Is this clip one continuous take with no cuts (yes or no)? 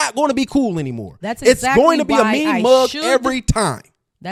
yes